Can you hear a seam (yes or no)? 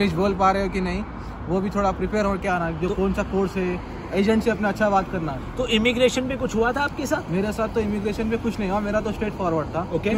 no